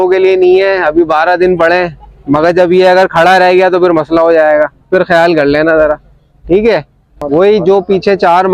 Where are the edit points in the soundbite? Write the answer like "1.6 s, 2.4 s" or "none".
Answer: 7.2 s